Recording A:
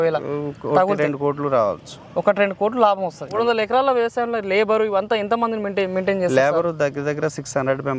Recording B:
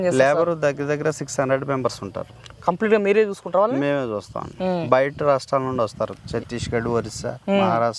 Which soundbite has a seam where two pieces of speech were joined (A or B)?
A